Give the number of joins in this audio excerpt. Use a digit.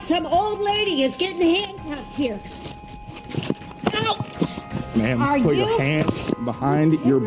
0